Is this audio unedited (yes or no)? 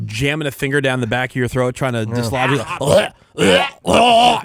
yes